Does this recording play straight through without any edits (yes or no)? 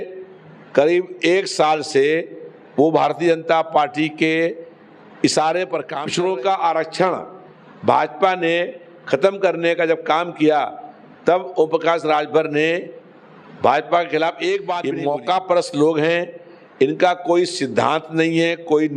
no